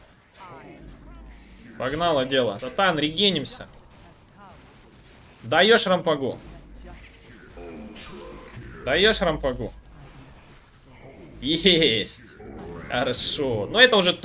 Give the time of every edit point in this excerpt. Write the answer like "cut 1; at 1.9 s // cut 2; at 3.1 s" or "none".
cut 1; at 2.6 s

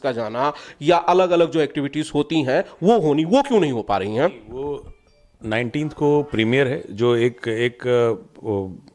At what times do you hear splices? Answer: none

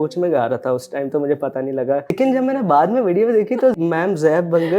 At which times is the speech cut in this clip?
cut 1; at 2.1 s // cut 2; at 3.8 s

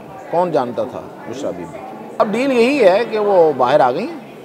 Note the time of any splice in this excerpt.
cut 1; at 2.2 s

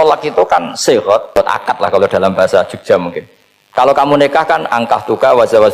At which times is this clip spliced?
cut 1; at 1.4 s

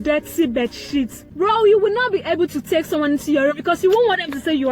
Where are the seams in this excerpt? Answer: cut 1; at 1.2 s

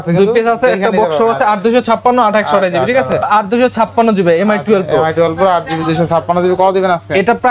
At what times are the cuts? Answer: cut 1; at 3.2 s

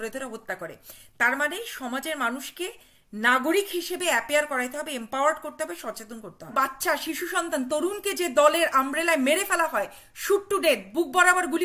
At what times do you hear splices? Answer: cut 1; at 6.5 s

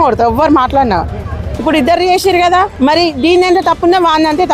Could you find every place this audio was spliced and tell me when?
cut 1; at 1.5 s // cut 2; at 2.7 s

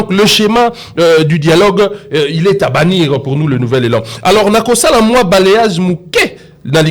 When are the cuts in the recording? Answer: none

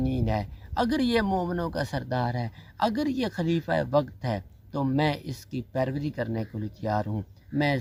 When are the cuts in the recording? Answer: none

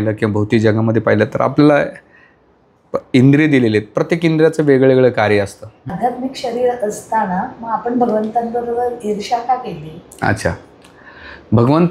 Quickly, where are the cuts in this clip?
cut 1; at 6.0 s

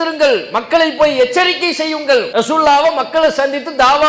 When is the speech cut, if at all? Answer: cut 1; at 2.3 s

